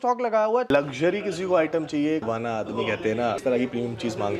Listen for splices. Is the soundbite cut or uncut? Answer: cut